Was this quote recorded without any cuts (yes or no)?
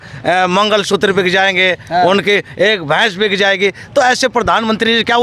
yes